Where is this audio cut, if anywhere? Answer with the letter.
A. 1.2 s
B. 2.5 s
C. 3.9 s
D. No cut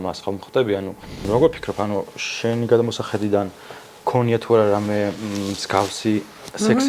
A